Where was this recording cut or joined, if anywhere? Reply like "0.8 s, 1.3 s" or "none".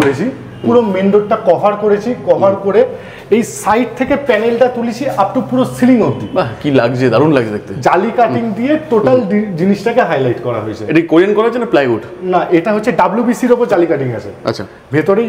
none